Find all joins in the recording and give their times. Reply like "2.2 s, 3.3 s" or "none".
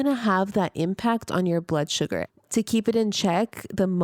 2.3 s

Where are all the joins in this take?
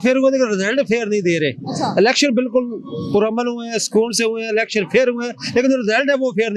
none

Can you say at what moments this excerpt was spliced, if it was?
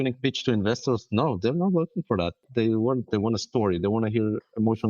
2.4 s

